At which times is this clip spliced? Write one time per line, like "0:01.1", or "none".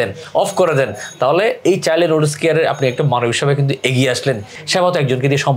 0:04.5